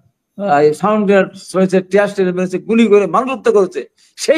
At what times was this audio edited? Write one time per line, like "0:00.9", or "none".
none